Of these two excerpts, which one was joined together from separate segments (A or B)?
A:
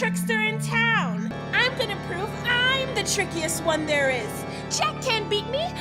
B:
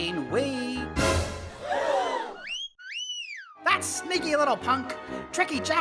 A